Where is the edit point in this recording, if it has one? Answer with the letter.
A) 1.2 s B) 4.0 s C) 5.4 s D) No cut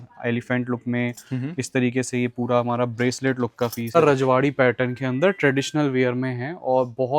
B